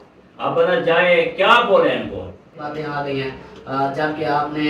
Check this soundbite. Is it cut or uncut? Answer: cut